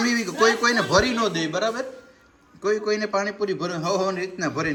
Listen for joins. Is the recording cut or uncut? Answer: uncut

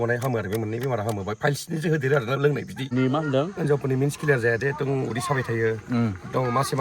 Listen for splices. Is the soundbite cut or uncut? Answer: cut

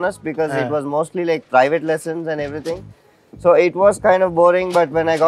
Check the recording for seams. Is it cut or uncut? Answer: uncut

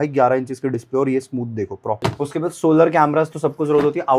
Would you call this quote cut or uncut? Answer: cut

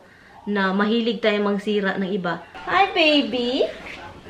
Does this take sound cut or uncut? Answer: cut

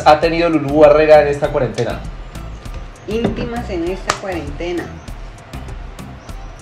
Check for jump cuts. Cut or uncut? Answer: uncut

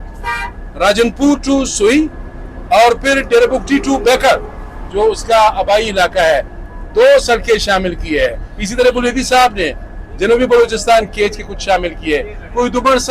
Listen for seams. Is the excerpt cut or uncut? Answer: uncut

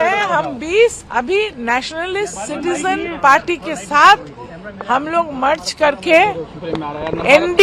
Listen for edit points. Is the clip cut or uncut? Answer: cut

